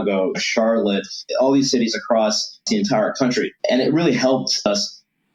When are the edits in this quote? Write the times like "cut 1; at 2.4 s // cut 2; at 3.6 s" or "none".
cut 1; at 1.2 s // cut 2; at 2.6 s // cut 3; at 3.6 s // cut 4; at 4.7 s